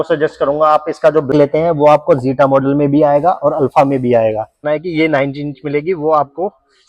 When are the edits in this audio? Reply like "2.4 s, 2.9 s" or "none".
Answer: 1.3 s, 4.5 s